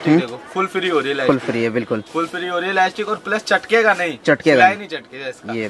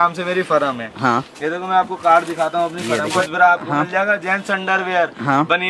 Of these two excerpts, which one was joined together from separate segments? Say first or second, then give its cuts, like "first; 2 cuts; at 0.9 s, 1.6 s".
second; 1 cut; at 3.2 s